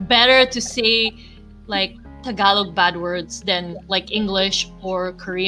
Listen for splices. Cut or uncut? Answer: uncut